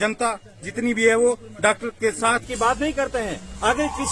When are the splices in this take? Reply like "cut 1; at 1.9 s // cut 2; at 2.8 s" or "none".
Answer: cut 1; at 2.4 s